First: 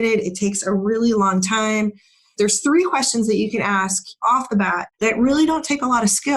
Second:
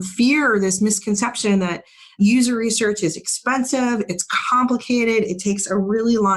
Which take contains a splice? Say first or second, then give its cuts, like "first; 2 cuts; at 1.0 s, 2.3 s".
first; 2 cuts; at 2.3 s, 4.5 s